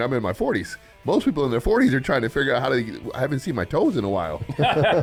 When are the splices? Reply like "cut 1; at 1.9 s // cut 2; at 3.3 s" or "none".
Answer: none